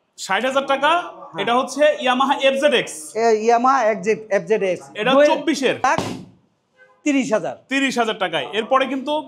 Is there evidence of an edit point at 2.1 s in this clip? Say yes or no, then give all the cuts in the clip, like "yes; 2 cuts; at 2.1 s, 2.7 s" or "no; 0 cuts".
no; 1 cut; at 5.8 s